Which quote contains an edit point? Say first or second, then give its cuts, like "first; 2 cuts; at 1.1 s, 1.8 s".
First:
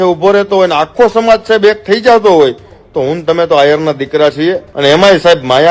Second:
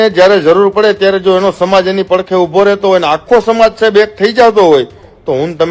first; 1 cut; at 4.7 s